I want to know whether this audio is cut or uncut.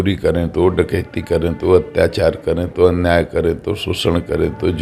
uncut